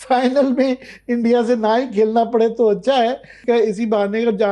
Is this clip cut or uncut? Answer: cut